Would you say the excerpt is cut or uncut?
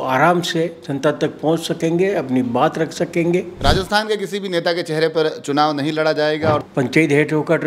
cut